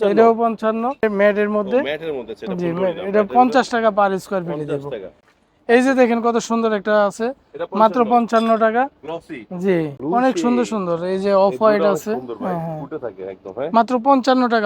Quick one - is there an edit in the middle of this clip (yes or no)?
yes